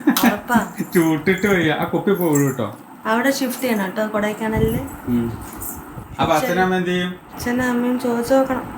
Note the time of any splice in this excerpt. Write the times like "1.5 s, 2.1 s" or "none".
7.3 s